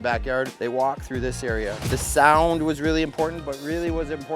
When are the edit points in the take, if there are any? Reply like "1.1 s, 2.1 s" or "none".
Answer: 1.8 s